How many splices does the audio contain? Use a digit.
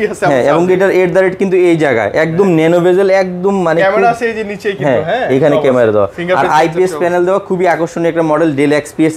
0